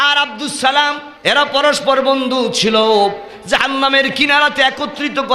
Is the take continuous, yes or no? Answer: no